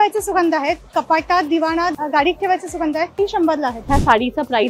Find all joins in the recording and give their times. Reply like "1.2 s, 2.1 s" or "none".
1.9 s, 3.5 s